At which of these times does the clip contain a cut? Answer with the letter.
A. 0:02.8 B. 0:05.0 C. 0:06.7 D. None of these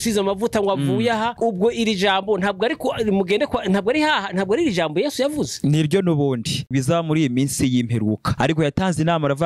C